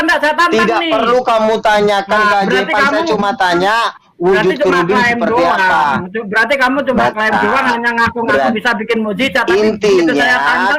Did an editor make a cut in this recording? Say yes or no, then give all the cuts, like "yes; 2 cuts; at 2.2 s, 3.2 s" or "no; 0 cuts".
no; 0 cuts